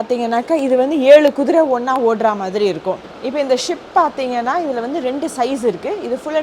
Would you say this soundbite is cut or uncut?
cut